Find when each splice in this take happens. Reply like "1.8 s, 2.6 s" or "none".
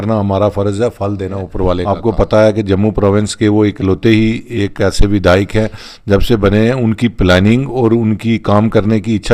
1.8 s